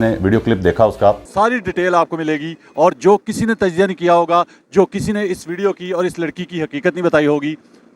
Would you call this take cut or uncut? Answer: cut